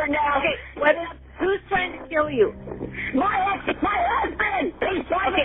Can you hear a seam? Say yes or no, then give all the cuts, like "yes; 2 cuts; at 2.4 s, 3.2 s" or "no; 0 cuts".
no; 0 cuts